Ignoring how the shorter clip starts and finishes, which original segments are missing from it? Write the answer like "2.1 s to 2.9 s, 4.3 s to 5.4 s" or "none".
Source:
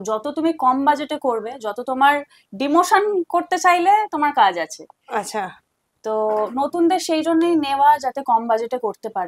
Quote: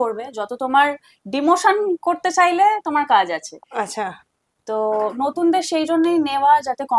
4.8 s to 4.9 s